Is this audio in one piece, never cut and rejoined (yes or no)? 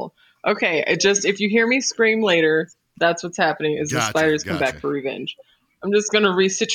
yes